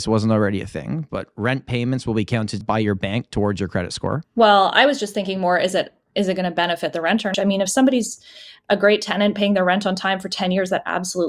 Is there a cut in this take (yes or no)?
yes